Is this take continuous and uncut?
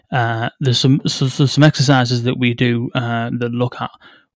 yes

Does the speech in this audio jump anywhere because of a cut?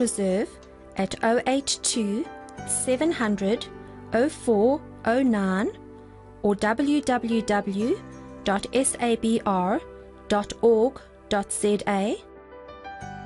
no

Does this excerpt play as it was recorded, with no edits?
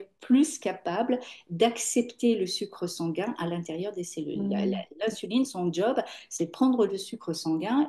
yes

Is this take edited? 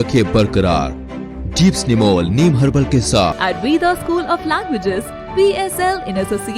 yes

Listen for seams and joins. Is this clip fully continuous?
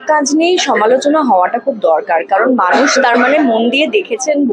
yes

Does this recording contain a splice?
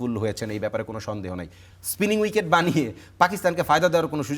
yes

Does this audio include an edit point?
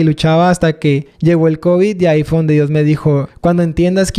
yes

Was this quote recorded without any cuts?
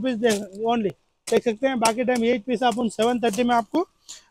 yes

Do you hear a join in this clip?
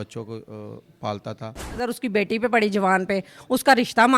yes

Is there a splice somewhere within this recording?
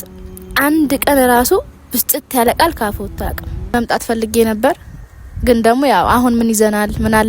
yes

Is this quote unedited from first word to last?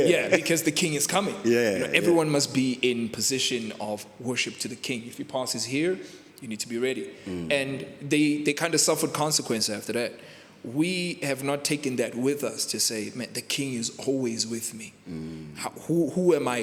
yes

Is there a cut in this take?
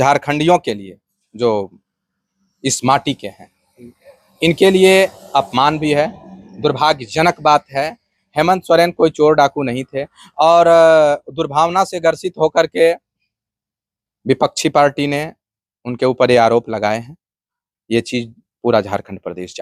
no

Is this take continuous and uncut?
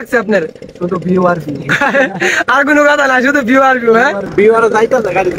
no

